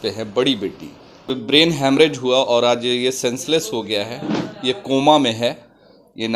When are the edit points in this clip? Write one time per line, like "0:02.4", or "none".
0:01.3